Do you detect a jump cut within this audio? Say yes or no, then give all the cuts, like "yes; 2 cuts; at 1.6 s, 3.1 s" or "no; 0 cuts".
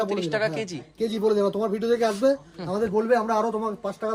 no; 0 cuts